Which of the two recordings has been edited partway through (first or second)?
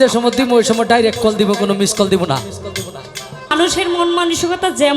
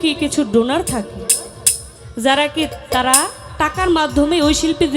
first